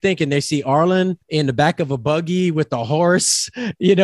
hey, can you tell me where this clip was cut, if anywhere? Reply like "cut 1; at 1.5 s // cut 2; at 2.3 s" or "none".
cut 1; at 1.2 s